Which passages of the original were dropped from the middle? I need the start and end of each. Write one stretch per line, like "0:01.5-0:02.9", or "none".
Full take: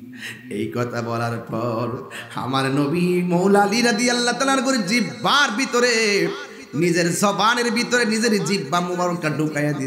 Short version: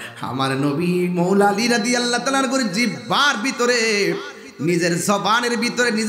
none